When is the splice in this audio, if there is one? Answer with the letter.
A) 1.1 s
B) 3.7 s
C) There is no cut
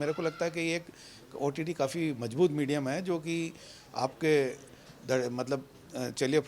C